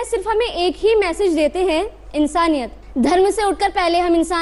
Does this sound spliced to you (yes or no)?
yes